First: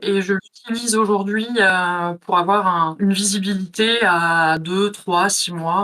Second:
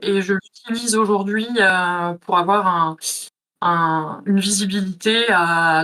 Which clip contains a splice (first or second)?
first